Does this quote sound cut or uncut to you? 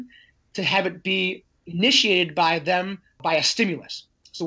cut